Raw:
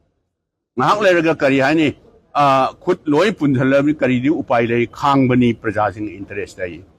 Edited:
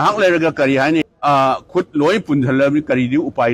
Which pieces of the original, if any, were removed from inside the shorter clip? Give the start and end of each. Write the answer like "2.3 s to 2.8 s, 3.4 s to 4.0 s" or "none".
1.9 s to 2.2 s